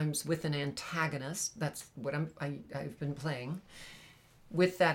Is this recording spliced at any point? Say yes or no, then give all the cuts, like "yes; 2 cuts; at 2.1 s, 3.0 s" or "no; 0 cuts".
no; 0 cuts